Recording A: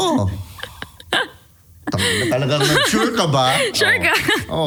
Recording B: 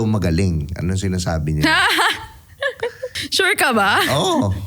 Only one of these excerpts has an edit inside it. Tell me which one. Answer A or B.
B